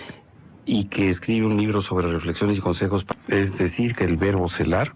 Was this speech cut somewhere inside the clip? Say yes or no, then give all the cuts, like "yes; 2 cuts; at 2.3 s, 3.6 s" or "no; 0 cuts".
no; 0 cuts